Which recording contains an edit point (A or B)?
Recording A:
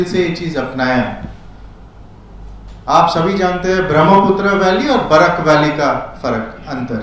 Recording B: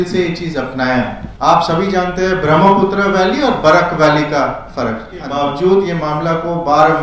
B